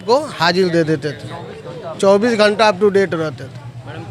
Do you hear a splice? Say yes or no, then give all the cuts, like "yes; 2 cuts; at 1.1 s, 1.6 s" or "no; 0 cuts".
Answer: no; 0 cuts